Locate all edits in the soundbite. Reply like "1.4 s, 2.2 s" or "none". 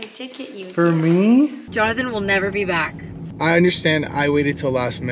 1.6 s, 3.2 s